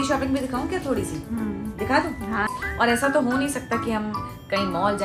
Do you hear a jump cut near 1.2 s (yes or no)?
no